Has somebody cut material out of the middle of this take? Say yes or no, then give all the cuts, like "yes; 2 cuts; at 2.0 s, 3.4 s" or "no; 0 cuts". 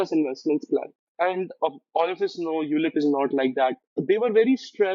yes; 2 cuts; at 1.0 s, 4.0 s